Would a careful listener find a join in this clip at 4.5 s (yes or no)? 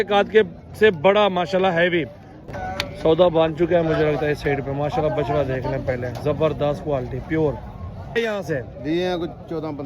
no